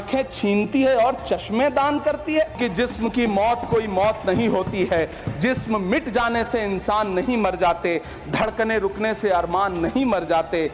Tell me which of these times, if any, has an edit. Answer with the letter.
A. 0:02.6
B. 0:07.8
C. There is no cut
A